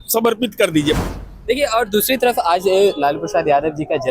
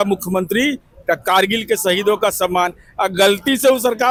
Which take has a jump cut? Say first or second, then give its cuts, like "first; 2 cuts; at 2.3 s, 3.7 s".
first; 1 cut; at 1.0 s